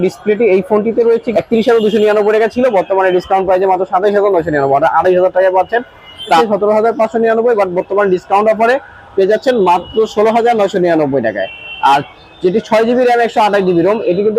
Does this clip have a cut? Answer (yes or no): yes